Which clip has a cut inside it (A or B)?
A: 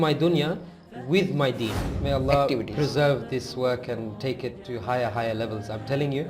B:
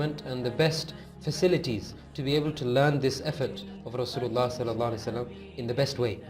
A